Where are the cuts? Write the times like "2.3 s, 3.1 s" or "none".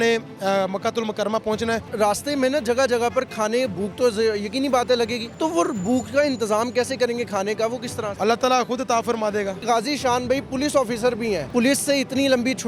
1.9 s, 5.2 s, 8.1 s, 9.6 s, 11.4 s